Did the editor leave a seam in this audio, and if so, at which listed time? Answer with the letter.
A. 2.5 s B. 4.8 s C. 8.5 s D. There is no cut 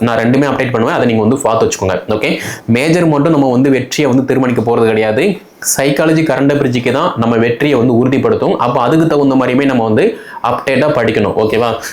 A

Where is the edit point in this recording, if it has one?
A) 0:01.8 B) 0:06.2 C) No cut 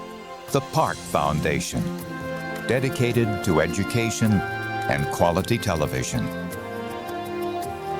B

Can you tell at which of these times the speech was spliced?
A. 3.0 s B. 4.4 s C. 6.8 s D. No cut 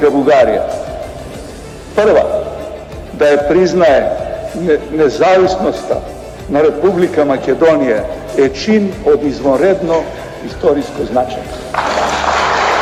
D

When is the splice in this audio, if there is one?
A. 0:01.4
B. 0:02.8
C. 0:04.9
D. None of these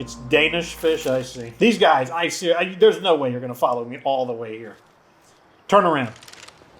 A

